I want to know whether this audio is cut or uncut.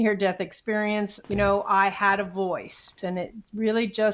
cut